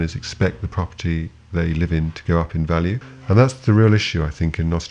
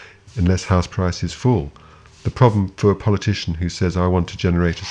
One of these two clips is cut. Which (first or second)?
first